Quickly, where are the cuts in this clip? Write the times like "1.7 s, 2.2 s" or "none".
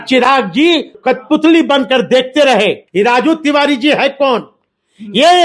1.0 s, 2.8 s